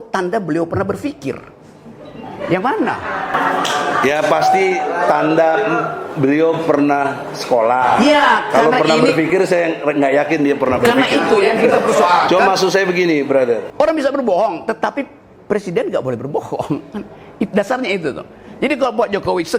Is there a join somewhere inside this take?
yes; 1 cut; at 13.7 s

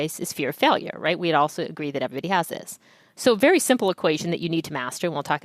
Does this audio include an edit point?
no; 0 cuts

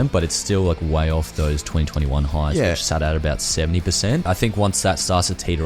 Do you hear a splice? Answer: yes; 1 cut; at 4.3 s

